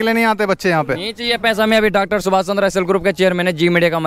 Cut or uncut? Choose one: uncut